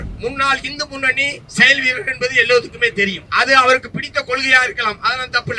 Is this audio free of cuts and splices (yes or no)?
no